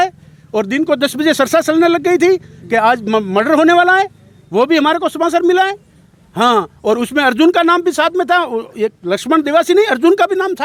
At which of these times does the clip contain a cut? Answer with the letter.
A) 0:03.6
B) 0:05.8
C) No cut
C